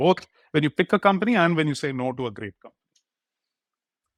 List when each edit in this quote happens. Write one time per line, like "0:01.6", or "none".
none